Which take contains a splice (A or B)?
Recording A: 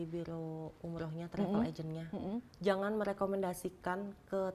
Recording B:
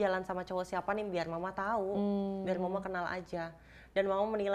A